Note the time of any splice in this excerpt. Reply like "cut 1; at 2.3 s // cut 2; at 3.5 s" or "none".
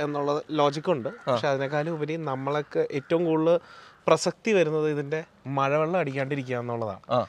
none